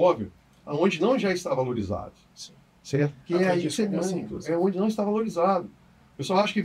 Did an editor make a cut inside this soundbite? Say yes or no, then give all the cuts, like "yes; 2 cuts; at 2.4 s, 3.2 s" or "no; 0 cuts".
no; 0 cuts